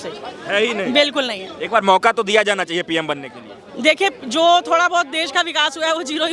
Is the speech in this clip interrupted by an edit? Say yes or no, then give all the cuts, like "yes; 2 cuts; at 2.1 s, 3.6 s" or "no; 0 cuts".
no; 0 cuts